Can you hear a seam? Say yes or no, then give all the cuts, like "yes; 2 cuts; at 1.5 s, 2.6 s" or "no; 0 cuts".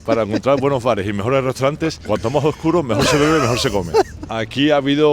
yes; 2 cuts; at 2.0 s, 4.2 s